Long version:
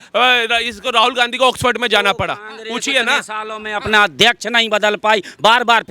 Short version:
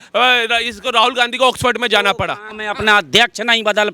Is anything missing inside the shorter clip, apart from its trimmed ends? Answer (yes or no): yes